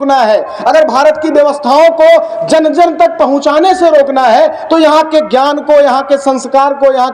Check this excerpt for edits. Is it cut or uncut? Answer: uncut